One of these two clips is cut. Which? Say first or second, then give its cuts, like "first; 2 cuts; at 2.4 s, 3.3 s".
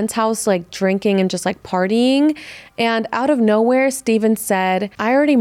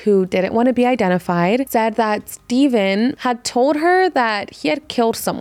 second; 2 cuts; at 1.7 s, 3.2 s